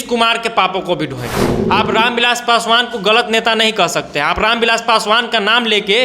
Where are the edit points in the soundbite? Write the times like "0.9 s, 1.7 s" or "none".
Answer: 1.5 s